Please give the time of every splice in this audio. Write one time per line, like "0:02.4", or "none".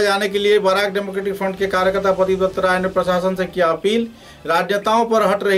none